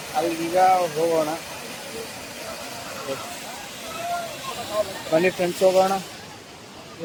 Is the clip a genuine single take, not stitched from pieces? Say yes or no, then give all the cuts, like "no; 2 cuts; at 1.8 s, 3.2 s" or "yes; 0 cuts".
yes; 0 cuts